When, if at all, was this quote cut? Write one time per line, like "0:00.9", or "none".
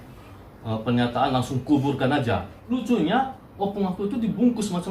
0:02.6